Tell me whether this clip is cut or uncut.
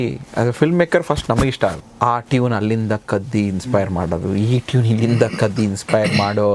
cut